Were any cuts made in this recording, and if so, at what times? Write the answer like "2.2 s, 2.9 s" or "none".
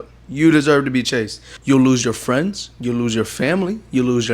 1.5 s